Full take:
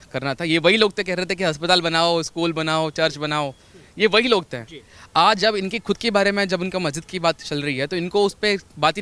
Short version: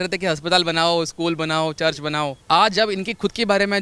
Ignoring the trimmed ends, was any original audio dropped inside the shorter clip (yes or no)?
yes